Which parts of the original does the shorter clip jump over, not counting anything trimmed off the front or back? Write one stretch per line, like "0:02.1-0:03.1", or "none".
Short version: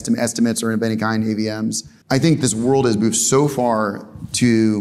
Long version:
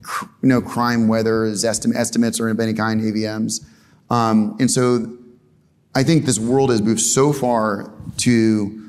0:03.7-0:05.7